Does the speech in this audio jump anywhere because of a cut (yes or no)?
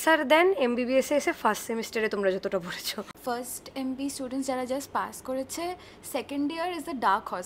yes